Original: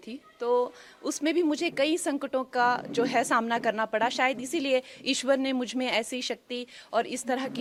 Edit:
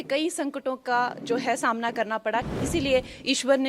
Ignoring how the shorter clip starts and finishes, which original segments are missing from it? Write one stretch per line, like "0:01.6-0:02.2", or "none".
0:04.2-0:04.3

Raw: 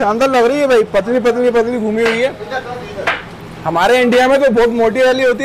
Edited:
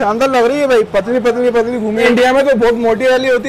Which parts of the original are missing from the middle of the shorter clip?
0:02.1-0:04.0

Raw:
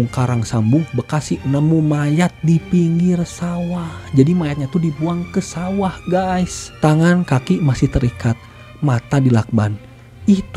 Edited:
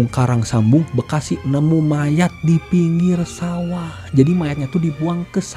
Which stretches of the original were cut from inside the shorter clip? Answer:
none

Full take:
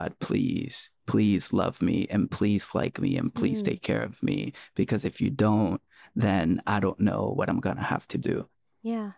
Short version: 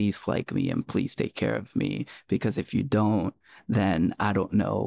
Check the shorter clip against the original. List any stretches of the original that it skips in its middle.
none

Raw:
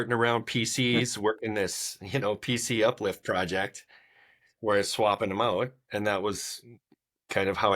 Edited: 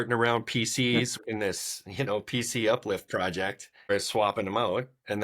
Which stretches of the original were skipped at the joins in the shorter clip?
0:01.2-0:01.4
0:04.0-0:04.7

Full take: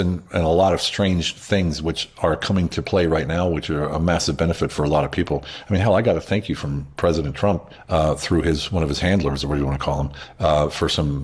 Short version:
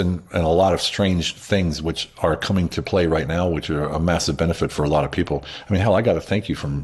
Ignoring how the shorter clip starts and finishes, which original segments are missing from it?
none

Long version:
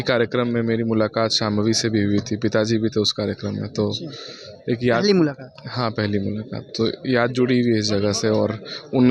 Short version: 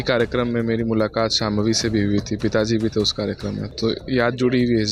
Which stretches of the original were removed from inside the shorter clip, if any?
0:03.7-0:06.6

